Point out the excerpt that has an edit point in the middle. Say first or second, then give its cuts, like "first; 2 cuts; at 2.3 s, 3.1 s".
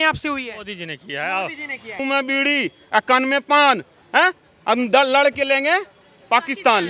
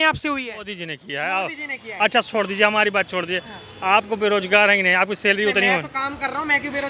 first; 1 cut; at 2.0 s